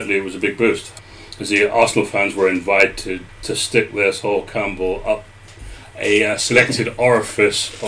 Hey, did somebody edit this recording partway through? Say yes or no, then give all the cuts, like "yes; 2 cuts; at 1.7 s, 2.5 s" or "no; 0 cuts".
no; 0 cuts